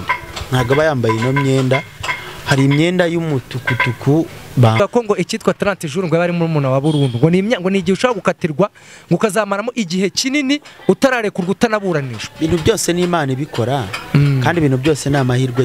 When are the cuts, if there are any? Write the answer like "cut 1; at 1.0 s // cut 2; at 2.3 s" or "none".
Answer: cut 1; at 4.8 s